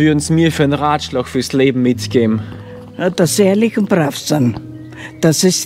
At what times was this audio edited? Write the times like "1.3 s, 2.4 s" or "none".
none